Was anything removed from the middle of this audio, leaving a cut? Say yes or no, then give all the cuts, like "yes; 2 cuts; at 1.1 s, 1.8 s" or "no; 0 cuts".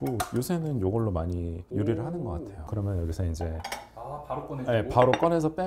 yes; 1 cut; at 2.6 s